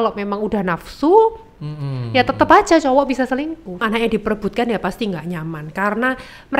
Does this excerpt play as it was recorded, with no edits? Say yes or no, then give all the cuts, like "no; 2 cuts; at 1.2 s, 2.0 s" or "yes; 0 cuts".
no; 1 cut; at 3.8 s